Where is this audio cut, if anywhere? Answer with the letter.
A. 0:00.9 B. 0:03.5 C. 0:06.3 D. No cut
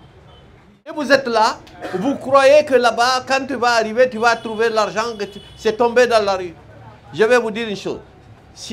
A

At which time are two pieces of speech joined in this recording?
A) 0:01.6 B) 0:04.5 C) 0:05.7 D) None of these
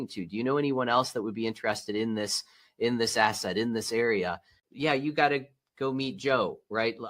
B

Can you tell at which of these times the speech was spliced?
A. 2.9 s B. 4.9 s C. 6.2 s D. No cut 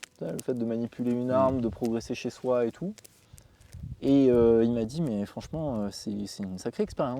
D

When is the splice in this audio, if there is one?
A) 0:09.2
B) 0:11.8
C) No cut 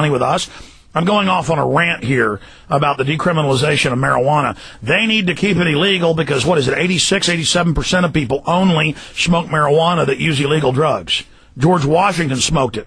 C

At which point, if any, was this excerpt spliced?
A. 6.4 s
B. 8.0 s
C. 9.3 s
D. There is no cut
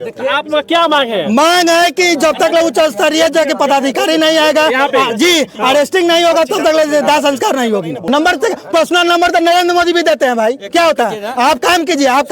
B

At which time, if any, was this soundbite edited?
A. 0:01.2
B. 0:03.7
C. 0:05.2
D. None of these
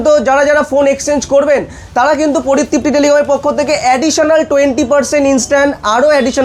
D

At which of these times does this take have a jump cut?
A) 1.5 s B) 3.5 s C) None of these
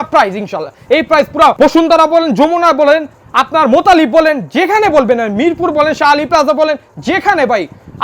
A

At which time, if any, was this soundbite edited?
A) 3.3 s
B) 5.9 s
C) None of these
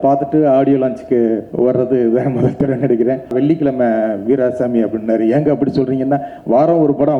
A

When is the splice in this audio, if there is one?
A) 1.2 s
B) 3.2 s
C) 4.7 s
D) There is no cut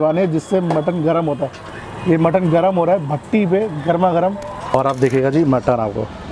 C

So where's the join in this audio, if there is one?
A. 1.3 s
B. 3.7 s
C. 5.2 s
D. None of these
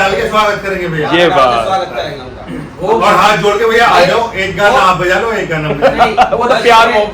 D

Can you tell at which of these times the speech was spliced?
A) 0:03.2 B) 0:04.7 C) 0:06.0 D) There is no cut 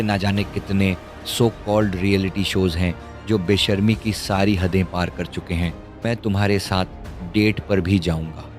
C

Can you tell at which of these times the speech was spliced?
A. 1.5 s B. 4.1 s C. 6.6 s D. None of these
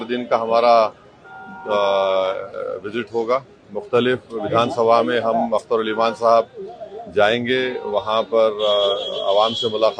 D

